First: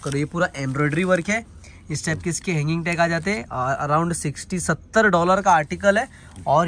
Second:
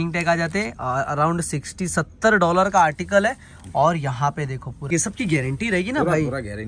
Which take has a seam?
second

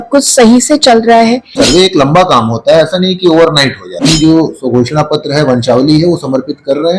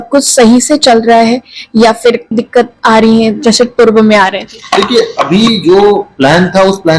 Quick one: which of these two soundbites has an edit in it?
first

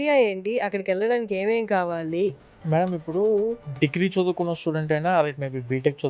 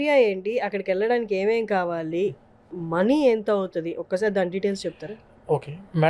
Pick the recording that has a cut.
first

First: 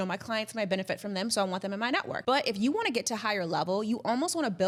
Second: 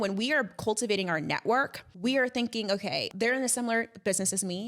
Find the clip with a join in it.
second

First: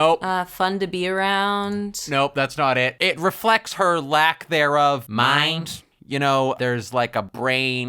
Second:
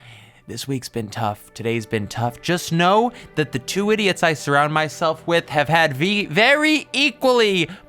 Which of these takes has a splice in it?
first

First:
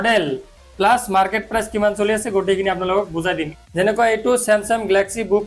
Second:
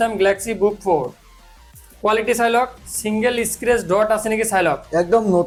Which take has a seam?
first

